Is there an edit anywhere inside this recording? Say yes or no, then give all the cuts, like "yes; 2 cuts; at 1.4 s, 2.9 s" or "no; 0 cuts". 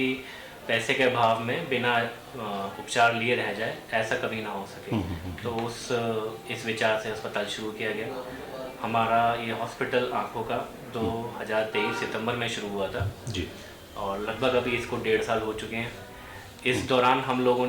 no; 0 cuts